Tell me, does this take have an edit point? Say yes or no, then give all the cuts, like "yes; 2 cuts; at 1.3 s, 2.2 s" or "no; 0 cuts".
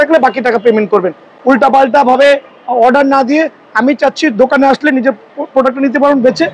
no; 0 cuts